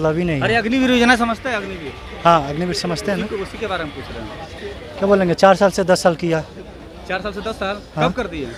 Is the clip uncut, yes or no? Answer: yes